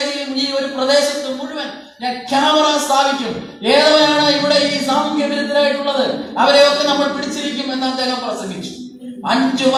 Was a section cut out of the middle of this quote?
no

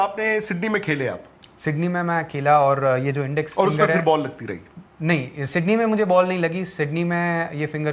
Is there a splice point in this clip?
no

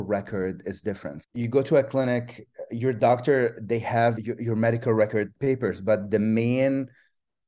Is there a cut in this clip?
yes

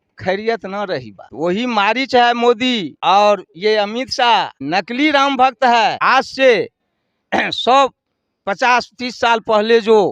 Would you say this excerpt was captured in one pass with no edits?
no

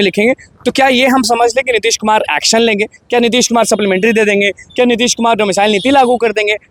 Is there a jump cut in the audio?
no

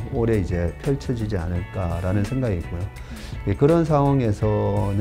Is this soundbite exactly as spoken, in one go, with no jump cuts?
yes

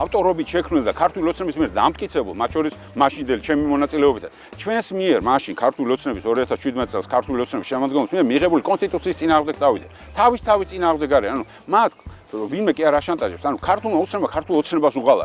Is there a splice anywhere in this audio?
no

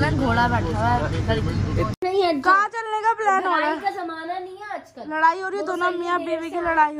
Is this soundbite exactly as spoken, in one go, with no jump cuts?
no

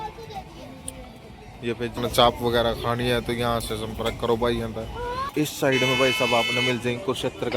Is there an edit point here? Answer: yes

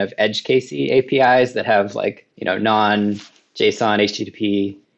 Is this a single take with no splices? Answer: no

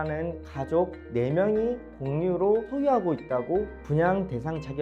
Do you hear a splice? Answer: no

